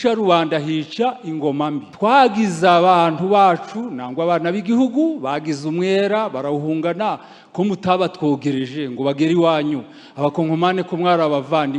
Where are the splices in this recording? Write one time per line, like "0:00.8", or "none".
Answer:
0:01.9